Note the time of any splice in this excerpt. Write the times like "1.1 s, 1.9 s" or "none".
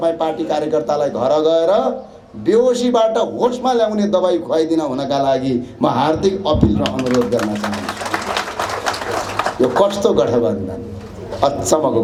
none